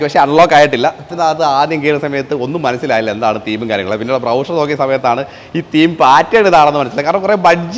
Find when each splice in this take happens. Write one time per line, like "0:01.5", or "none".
0:01.1